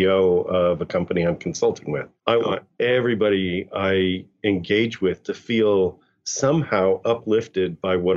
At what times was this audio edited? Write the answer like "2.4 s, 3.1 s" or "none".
2.1 s